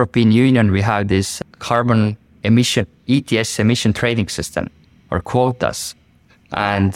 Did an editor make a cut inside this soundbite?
no; 0 cuts

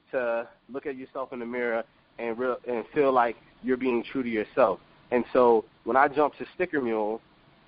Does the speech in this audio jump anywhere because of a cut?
no; 0 cuts

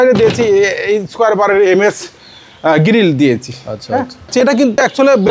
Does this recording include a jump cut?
yes; 1 cut; at 4.3 s

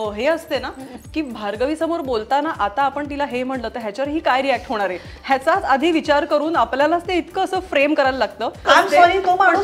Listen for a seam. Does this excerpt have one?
yes; 1 cut; at 8.6 s

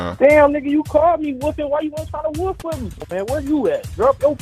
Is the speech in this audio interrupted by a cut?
yes; 1 cut; at 3.0 s

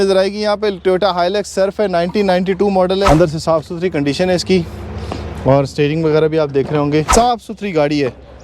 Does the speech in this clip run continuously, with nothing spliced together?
no; 2 cuts; at 3.1 s, 7.1 s

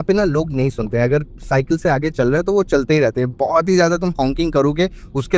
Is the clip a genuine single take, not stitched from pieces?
yes; 0 cuts

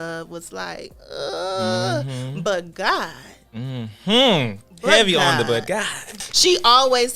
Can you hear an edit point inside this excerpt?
yes; 1 cut; at 6.1 s

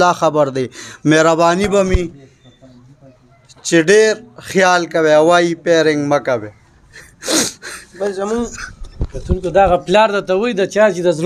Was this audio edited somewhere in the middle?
no; 0 cuts

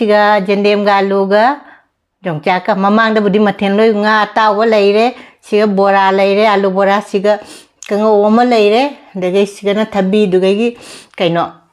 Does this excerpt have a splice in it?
no; 0 cuts

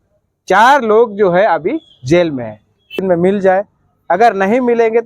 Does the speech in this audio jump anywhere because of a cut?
yes; 1 cut; at 3.0 s

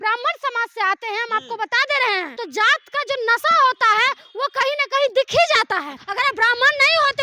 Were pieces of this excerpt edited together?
yes; 2 cuts; at 2.4 s, 6.0 s

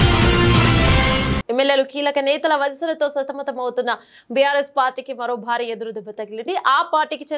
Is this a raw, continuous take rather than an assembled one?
no; 1 cut; at 1.4 s

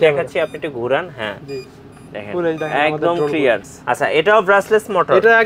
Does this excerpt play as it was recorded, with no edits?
no; 1 cut; at 3.7 s

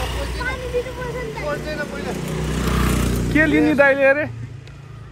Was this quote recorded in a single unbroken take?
yes; 0 cuts

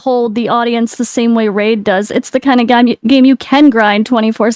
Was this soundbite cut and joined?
no; 0 cuts

